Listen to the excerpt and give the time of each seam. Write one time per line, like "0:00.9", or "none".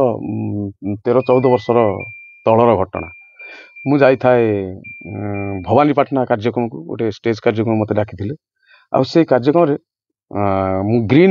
none

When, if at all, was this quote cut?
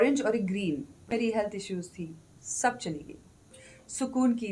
0:01.1

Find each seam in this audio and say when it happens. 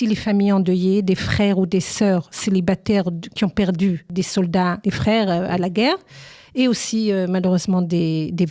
0:04.5

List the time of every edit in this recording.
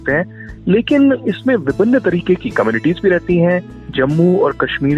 0:01.3

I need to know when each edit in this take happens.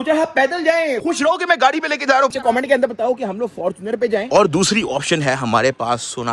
0:00.9
0:02.4
0:04.3

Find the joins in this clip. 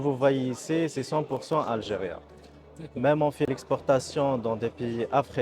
0:03.4

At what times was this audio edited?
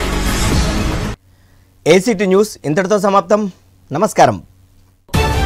none

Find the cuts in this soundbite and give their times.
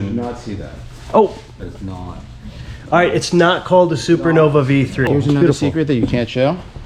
0:05.1

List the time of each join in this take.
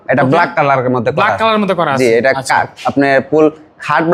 none

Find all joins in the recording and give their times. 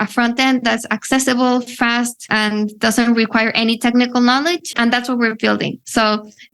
0:02.3
0:04.7

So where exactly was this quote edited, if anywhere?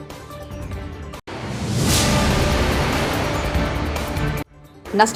none

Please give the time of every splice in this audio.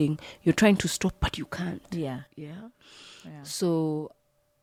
none

